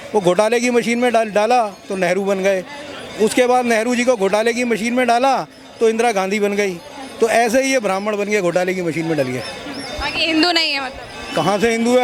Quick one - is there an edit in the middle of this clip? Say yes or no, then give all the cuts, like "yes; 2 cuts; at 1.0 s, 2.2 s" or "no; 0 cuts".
no; 0 cuts